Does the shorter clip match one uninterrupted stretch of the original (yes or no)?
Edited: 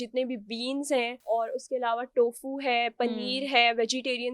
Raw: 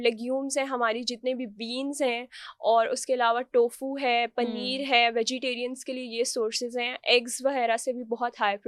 no